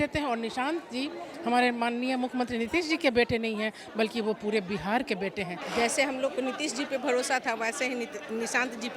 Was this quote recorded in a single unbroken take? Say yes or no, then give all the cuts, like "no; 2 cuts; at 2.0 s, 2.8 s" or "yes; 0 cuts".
no; 1 cut; at 5.6 s